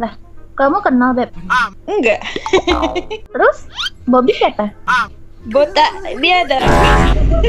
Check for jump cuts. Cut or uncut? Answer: cut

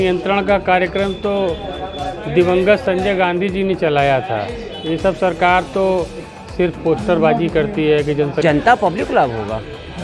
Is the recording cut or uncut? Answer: cut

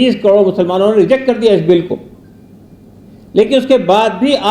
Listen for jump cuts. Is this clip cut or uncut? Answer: uncut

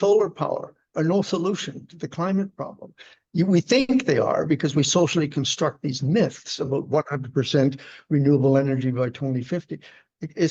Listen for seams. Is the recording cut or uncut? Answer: uncut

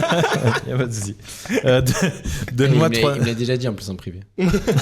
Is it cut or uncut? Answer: uncut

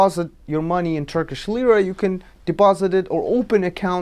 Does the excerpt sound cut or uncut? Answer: uncut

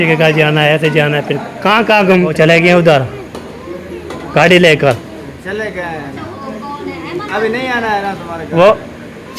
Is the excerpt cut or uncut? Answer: cut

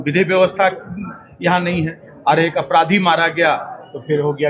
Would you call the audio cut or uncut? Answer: uncut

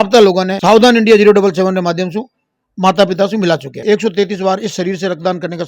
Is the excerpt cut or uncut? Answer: cut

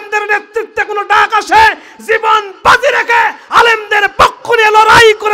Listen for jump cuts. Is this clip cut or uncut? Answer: uncut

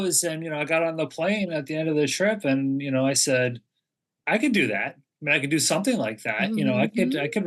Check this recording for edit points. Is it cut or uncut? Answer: uncut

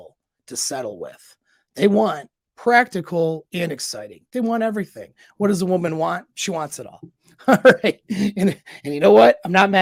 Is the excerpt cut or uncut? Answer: uncut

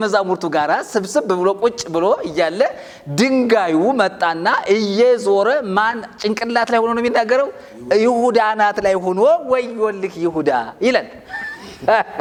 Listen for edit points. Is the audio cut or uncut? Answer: uncut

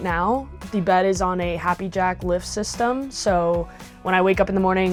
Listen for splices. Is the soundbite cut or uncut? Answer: uncut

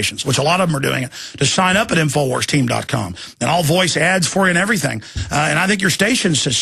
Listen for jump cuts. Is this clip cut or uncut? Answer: cut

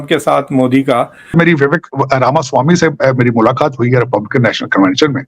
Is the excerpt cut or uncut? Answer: cut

